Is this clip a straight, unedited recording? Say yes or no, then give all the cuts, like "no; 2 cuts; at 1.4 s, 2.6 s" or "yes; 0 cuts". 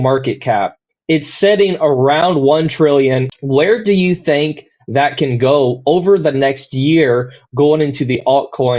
no; 1 cut; at 3.3 s